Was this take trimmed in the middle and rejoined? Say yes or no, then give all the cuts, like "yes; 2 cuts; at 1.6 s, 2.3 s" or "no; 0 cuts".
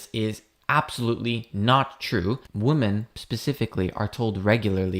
yes; 1 cut; at 2.5 s